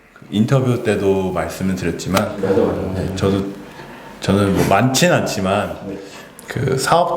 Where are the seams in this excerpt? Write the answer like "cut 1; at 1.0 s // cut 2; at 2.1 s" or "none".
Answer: none